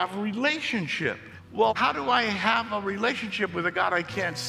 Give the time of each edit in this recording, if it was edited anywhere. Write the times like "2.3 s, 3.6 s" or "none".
1.7 s